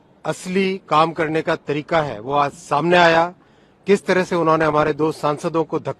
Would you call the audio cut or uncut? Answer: uncut